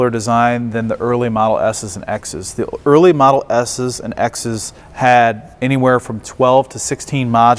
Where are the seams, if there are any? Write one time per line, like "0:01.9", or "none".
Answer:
none

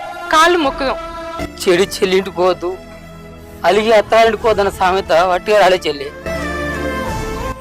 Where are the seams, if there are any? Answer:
0:01.4

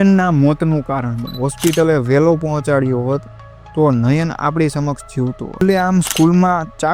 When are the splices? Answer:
0:01.4
0:05.6

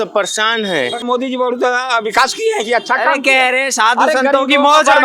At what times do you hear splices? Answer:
0:01.0

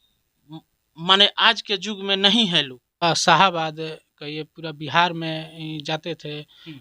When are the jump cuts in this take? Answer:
0:03.0

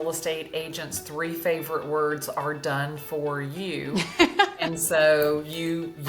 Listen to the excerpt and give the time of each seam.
none

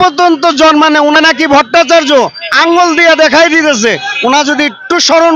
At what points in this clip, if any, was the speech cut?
0:01.2

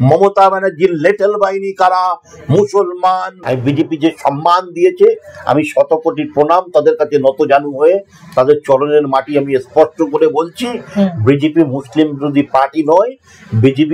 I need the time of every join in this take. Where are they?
0:03.3

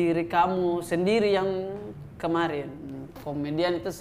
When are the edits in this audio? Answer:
0:02.8

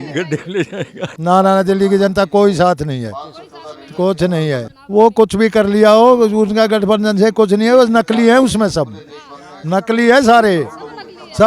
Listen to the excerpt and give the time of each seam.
0:01.0
0:04.7

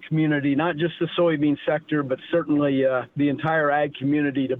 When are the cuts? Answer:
0:03.1

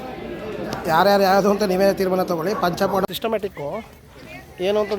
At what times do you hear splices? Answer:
0:03.1

